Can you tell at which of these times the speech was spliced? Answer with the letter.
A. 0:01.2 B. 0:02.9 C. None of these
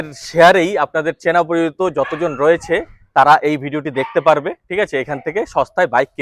C